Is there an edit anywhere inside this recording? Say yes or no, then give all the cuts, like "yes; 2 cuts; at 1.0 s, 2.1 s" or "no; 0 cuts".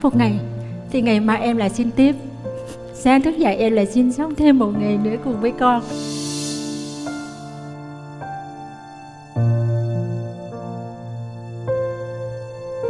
no; 0 cuts